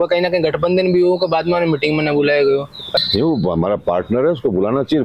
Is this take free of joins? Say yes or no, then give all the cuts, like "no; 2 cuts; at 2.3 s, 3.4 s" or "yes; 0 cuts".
no; 1 cut; at 3.0 s